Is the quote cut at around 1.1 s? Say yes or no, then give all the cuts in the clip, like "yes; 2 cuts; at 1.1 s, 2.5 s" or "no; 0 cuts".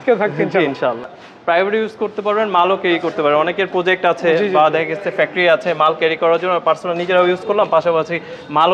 yes; 1 cut; at 1.1 s